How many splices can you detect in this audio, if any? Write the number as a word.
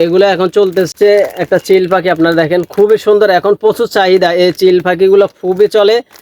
one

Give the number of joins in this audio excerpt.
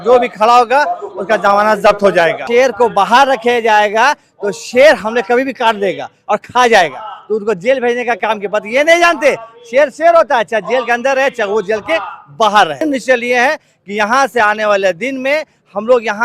two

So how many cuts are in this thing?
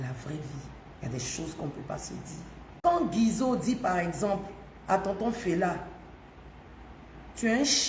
one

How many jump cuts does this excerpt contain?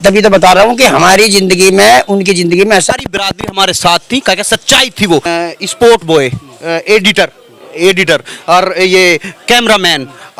two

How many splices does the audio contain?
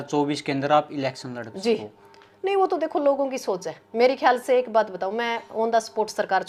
zero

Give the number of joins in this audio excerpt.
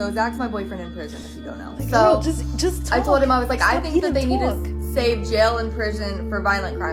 zero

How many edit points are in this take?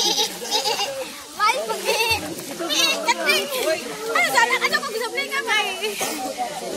one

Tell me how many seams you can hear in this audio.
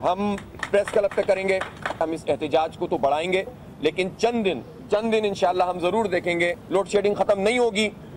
three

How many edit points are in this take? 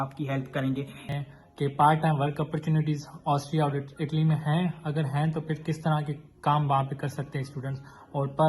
one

